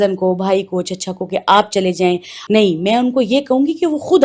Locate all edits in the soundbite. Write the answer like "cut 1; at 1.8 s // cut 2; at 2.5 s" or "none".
cut 1; at 2.3 s